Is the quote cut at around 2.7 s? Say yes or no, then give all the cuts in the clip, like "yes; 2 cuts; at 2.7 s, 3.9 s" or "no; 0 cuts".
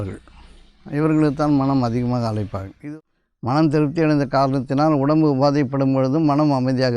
yes; 1 cut; at 2.7 s